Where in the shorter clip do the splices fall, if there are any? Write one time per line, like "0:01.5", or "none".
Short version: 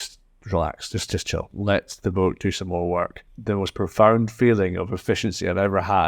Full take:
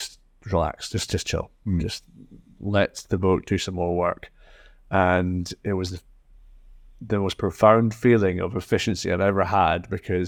0:01.5
0:03.3

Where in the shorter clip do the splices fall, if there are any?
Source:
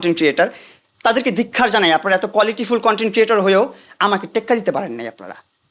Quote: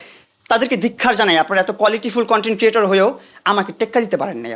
none

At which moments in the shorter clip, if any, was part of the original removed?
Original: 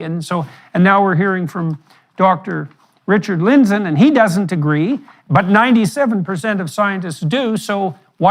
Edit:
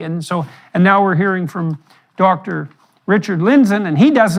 none

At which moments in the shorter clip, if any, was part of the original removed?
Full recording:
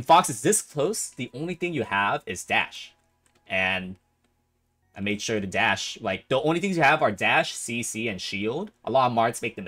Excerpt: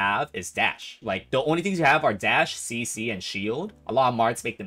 0:00.9

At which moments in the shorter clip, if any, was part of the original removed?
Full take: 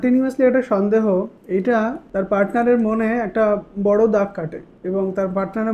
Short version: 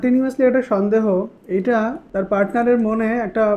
none

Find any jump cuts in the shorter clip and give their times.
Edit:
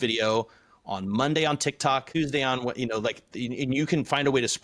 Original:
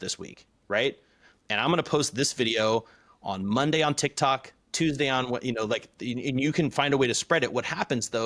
0:02.1

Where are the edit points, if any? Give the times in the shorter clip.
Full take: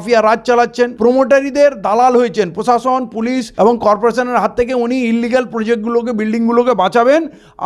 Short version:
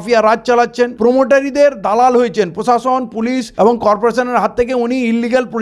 none

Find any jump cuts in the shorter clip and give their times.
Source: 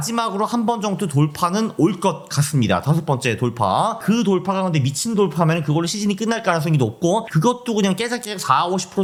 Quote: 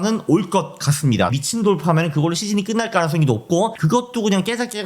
0:01.3

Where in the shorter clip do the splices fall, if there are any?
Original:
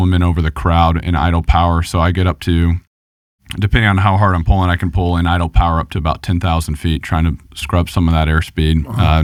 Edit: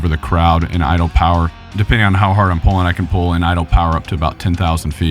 0:01.5

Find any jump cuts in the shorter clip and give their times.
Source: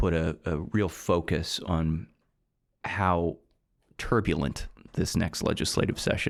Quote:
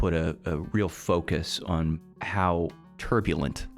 0:02.1
0:02.9

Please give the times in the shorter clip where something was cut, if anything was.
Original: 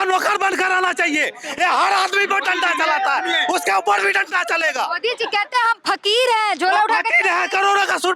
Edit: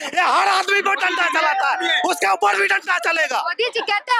none

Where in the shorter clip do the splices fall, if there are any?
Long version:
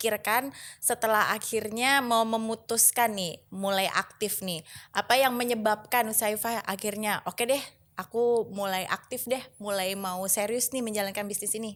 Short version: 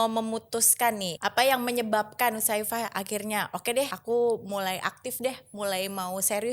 0:01.1
0:04.0

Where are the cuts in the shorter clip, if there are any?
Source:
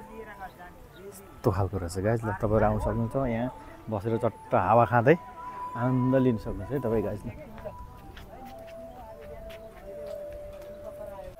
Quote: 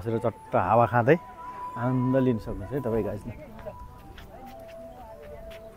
none

